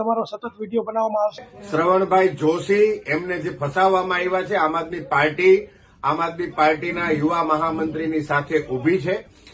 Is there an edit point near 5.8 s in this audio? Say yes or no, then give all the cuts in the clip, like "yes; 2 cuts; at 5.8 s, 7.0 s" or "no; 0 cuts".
no; 1 cut; at 1.5 s